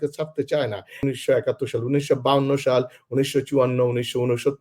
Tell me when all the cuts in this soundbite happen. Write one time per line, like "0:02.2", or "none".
0:01.0